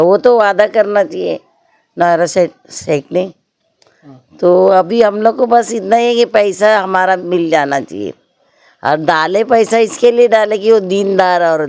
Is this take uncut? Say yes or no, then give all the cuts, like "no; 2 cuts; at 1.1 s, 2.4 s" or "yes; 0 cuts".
yes; 0 cuts